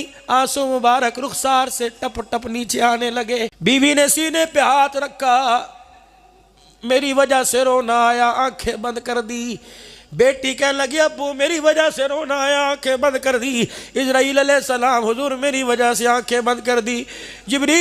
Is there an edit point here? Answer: yes; 1 cut; at 3.5 s

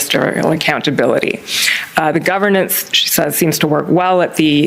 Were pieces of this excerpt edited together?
yes; 1 cut; at 0.9 s

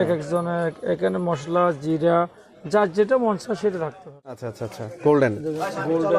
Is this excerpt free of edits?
no; 1 cut; at 4.4 s

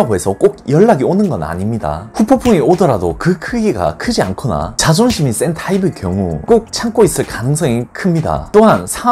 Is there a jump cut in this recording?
no; 0 cuts

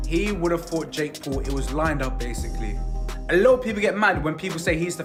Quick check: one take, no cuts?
yes; 0 cuts

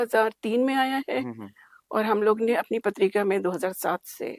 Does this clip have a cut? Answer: no; 0 cuts

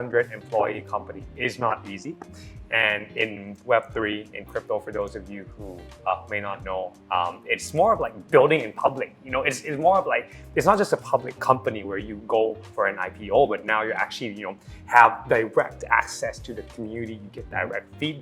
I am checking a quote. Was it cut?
no; 0 cuts

